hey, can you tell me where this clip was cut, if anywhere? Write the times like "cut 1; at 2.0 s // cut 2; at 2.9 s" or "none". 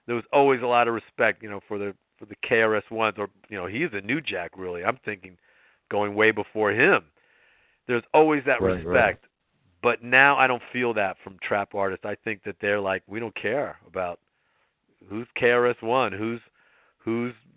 none